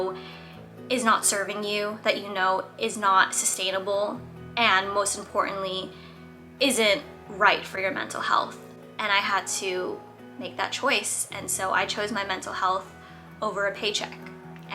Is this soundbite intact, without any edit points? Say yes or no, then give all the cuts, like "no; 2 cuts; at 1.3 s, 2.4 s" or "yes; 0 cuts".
yes; 0 cuts